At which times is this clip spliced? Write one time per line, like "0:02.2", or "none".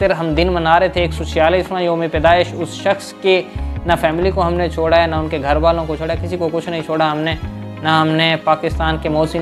none